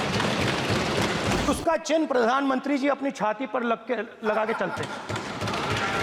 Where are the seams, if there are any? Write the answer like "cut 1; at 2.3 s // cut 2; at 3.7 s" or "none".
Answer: cut 1; at 1.5 s